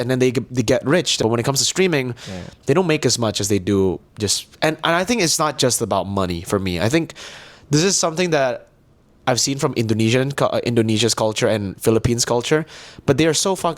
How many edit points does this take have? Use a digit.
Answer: 1